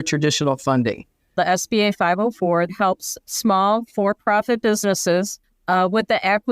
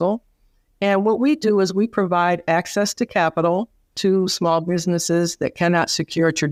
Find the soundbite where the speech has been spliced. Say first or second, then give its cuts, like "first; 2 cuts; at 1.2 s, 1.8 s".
first; 3 cuts; at 1.3 s, 2.7 s, 5.4 s